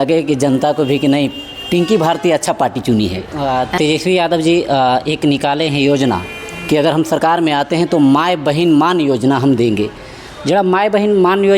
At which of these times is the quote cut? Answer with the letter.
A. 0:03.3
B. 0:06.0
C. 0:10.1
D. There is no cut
A